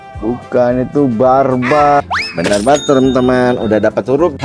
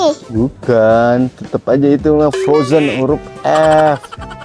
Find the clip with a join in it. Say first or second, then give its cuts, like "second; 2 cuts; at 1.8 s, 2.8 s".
first; 1 cut; at 2.0 s